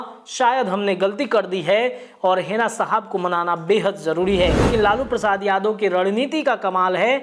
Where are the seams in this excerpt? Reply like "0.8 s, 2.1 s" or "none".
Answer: 4.7 s

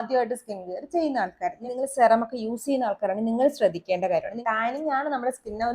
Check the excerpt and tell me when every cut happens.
1.6 s, 4.3 s

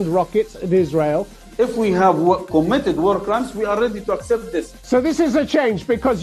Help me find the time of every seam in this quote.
1.4 s, 4.8 s

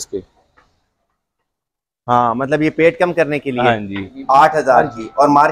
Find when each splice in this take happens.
4.1 s

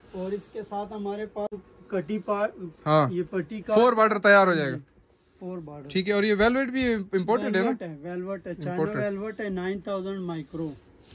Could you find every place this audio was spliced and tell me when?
1.6 s

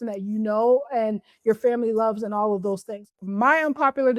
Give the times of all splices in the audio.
3.0 s

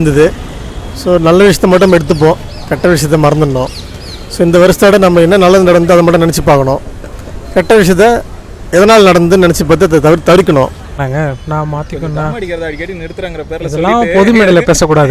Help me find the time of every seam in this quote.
11.0 s

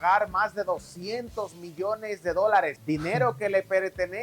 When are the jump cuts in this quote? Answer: 2.8 s

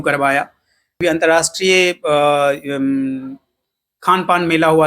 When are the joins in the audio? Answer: 1.0 s

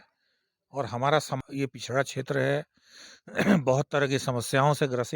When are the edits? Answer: 1.3 s

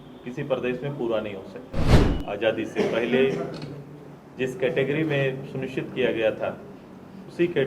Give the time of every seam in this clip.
1.9 s

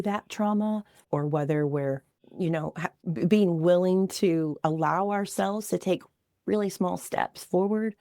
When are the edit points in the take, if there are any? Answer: 0.9 s, 2.2 s, 2.9 s

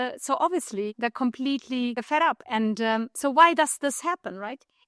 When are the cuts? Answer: 0.9 s, 2.0 s

